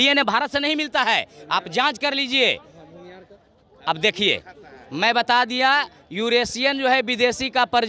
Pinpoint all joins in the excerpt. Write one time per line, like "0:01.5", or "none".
none